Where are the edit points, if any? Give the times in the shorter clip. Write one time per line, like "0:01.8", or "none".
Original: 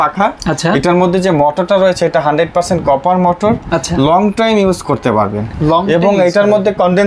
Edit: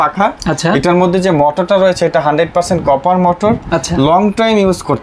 none